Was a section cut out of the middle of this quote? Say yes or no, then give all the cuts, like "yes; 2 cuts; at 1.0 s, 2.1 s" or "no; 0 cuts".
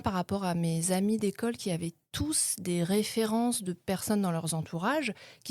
no; 0 cuts